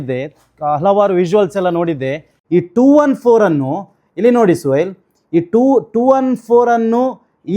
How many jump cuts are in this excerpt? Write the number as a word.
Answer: one